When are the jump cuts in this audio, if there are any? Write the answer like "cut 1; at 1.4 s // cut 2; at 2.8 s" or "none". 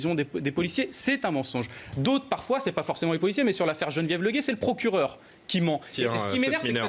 cut 1; at 5.9 s